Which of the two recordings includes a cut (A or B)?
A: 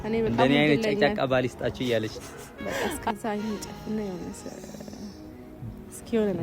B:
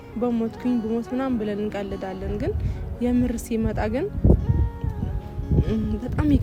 A